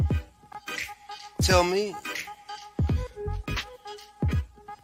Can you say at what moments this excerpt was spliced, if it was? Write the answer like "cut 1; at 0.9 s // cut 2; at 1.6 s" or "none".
none